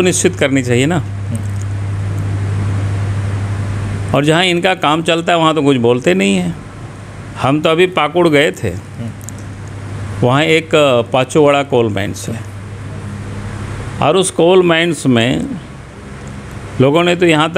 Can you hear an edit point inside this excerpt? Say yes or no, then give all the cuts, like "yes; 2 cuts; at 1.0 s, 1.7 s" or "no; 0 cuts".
no; 0 cuts